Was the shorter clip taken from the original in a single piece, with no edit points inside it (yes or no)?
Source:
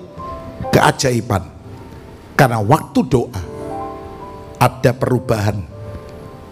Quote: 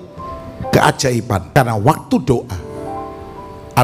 no